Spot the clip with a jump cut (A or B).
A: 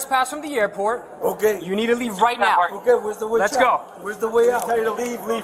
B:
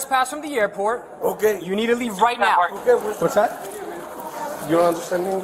B